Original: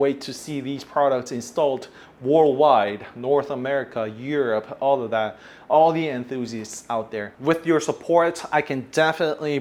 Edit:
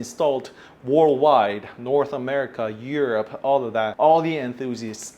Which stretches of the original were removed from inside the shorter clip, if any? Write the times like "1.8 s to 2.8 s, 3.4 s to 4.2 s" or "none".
5.3 s to 5.6 s